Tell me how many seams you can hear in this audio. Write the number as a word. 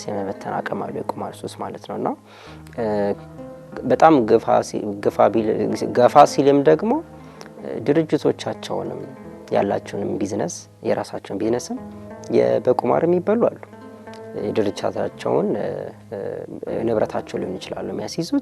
zero